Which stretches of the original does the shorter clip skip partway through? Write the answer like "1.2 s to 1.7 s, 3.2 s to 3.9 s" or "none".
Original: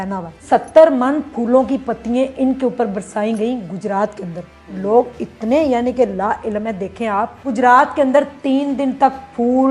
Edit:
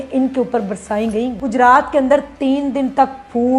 3.6 s to 7.4 s